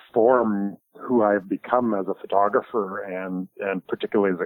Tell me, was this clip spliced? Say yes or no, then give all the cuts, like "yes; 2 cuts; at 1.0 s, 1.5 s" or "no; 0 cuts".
no; 0 cuts